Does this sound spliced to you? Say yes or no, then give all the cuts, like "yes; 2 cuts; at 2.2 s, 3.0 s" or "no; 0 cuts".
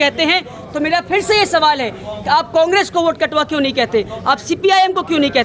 no; 0 cuts